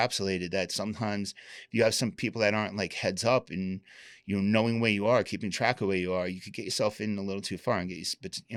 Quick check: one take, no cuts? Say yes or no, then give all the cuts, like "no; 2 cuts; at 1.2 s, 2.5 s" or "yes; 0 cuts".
yes; 0 cuts